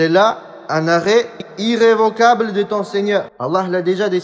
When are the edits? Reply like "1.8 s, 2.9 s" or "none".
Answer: 3.3 s